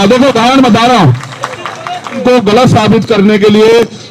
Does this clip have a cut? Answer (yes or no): yes